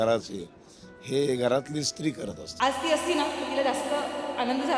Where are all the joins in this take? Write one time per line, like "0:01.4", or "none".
0:02.6